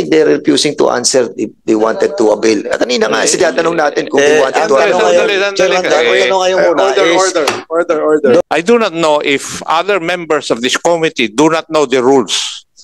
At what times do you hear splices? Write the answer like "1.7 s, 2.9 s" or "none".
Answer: 8.4 s